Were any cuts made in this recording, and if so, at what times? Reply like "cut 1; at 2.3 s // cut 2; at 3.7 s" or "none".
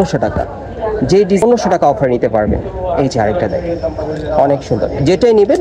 cut 1; at 1.4 s